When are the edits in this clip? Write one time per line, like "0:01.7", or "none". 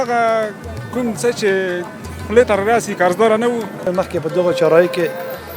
0:03.9